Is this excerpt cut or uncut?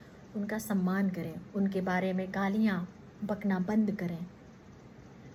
uncut